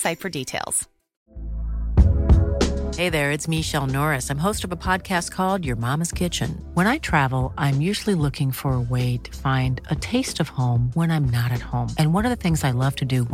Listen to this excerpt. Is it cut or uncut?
cut